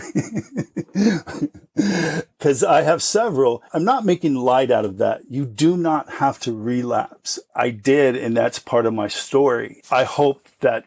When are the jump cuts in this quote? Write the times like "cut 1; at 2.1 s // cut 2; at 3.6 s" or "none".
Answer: cut 1; at 2.4 s // cut 2; at 3.7 s // cut 3; at 7.5 s // cut 4; at 9.7 s